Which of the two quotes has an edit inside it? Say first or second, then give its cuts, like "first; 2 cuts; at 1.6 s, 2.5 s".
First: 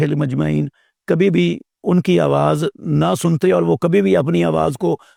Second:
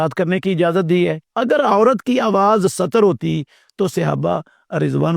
second; 1 cut; at 1.2 s